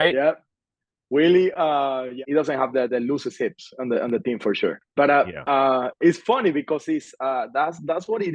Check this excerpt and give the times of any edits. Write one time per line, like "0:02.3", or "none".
0:02.2
0:04.8